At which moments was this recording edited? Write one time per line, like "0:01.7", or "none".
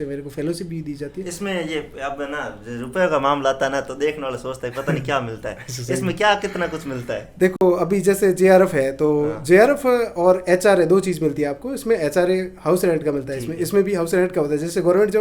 none